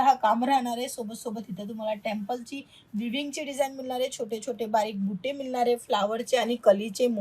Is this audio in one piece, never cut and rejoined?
yes; 0 cuts

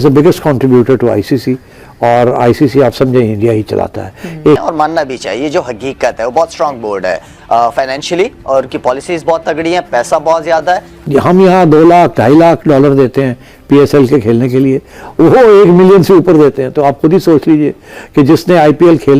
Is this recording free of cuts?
no; 2 cuts; at 4.6 s, 11.0 s

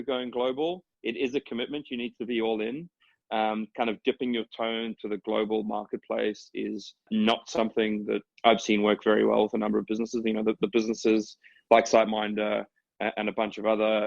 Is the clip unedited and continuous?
no; 2 cuts; at 7.1 s, 8.3 s

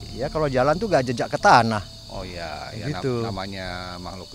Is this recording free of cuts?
yes; 0 cuts

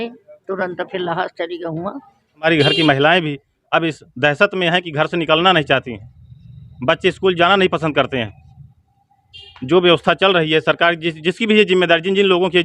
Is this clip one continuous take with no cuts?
no; 1 cut; at 2.5 s

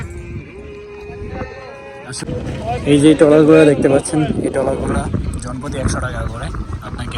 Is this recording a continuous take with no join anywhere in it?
no; 1 cut; at 2.2 s

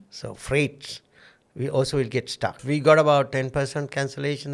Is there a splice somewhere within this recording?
yes; 1 cut; at 2.6 s

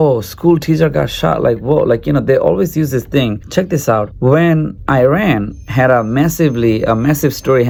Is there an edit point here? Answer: no; 0 cuts

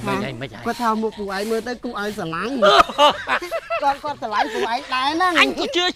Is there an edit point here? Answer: no; 0 cuts

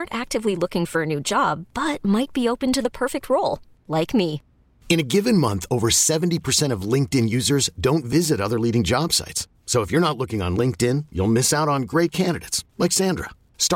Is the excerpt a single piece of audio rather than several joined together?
yes; 0 cuts

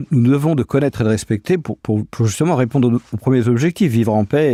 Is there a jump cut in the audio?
no; 0 cuts

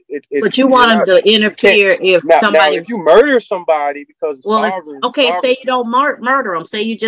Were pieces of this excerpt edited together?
no; 0 cuts

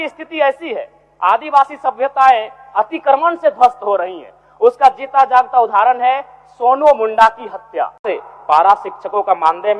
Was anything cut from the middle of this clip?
yes; 1 cut; at 8.0 s

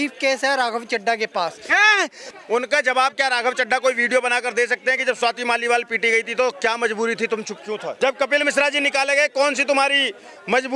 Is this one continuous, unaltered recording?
no; 2 cuts; at 2.2 s, 8.0 s

